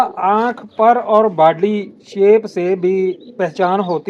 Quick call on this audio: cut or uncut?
uncut